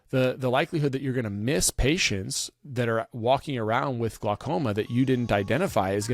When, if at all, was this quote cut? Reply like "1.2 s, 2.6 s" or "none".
none